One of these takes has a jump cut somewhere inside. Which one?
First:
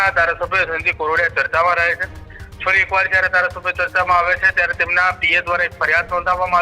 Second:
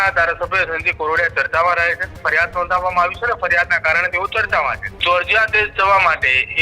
second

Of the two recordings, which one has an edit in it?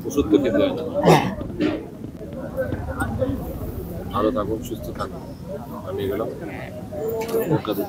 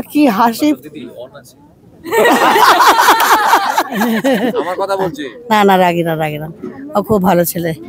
second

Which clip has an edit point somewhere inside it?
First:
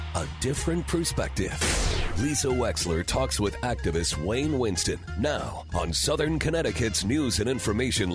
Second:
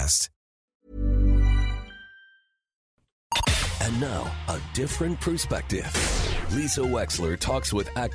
second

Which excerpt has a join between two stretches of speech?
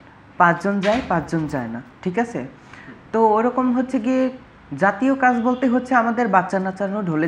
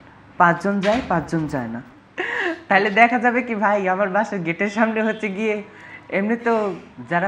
second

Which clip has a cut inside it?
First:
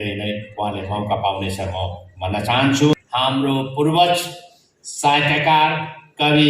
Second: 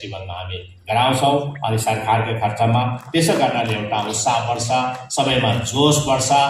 first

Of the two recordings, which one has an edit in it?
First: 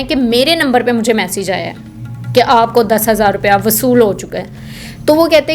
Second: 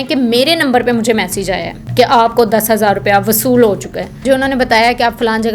second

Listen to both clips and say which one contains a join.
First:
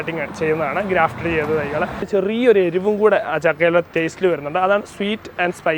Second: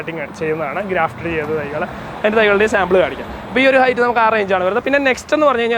first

